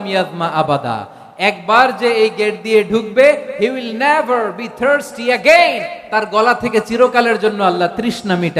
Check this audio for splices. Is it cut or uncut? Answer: uncut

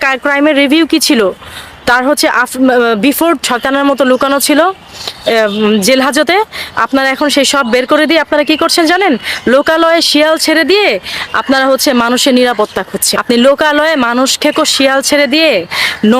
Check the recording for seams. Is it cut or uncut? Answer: cut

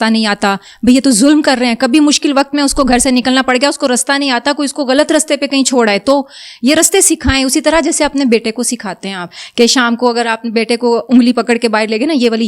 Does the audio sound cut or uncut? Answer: uncut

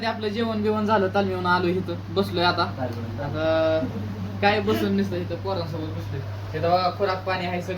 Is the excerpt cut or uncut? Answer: uncut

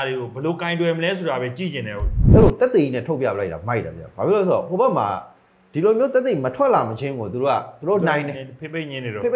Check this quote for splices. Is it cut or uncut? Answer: cut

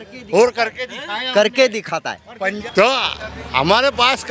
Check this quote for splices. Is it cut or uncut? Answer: cut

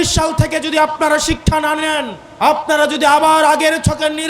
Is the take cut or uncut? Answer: cut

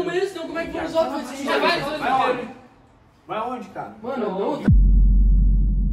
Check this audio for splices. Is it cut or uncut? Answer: cut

